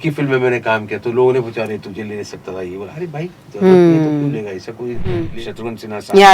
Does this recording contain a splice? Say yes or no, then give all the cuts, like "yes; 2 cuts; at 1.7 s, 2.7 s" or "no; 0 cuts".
yes; 1 cut; at 5.3 s